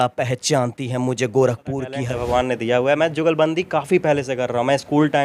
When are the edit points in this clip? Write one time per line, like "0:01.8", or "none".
0:01.9